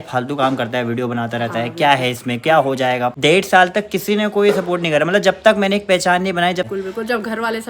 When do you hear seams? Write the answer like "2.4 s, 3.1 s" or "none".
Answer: 3.1 s, 6.7 s